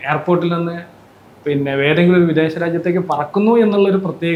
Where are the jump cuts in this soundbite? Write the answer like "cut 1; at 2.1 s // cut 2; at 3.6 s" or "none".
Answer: none